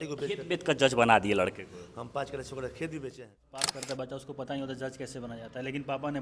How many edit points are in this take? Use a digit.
1